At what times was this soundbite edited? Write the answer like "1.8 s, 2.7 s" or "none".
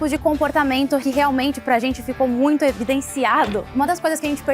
1.0 s, 3.7 s